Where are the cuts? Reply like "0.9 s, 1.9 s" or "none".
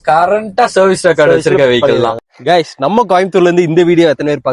2.3 s